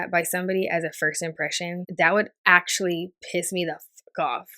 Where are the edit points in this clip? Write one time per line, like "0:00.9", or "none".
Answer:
0:01.8